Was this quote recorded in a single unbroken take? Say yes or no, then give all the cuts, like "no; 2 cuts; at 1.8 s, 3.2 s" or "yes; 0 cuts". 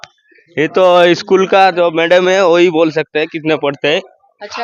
yes; 0 cuts